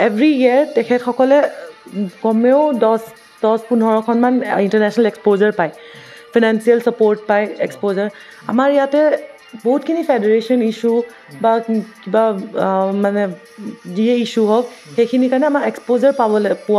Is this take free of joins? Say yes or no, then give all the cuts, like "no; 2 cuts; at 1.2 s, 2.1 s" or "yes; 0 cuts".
yes; 0 cuts